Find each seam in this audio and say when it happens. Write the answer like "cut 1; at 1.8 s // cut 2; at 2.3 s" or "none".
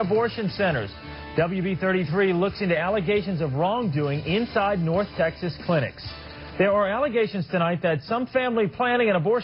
cut 1; at 5.4 s